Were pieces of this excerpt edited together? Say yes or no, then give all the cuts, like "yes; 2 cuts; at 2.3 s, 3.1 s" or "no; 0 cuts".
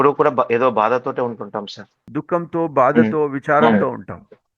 yes; 1 cut; at 2.1 s